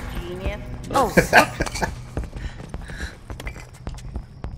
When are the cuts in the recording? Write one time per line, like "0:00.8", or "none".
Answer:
0:03.3